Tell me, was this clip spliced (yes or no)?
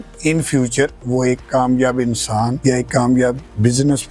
no